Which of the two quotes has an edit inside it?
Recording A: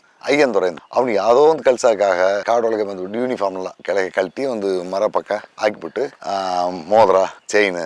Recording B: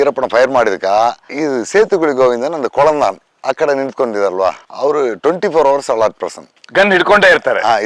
B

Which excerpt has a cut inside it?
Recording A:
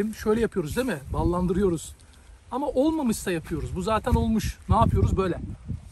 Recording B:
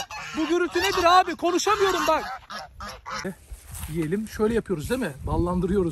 B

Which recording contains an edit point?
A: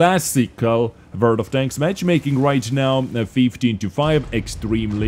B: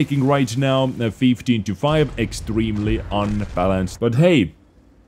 B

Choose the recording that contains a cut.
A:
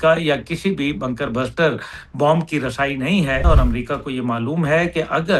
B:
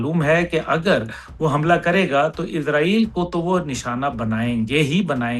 A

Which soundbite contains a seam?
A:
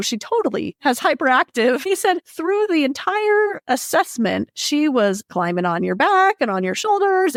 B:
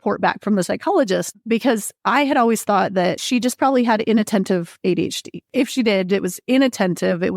B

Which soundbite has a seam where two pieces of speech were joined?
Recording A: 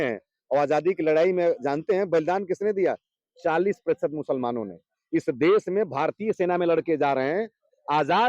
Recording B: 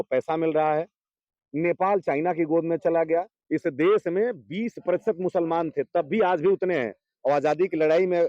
B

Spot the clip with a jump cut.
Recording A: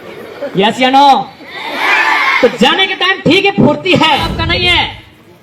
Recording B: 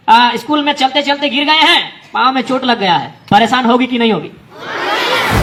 A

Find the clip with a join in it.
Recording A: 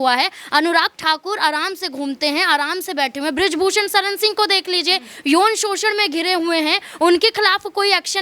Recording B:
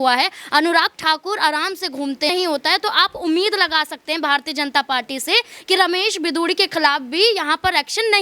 B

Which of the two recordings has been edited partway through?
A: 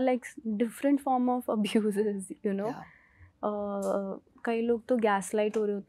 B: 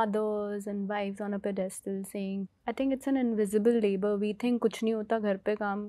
B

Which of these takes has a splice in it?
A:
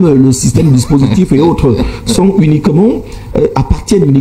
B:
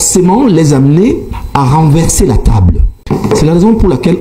B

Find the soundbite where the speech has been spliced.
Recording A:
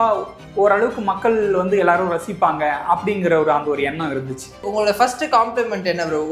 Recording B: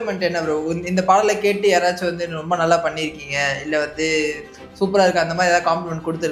A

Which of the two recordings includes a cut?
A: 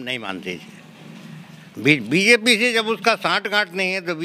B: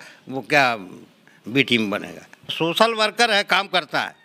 B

